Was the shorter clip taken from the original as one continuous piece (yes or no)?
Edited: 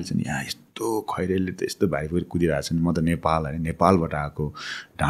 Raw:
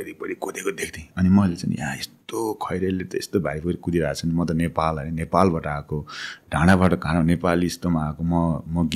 yes